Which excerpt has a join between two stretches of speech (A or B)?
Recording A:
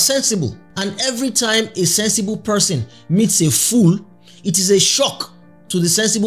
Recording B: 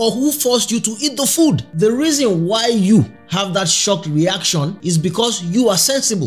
B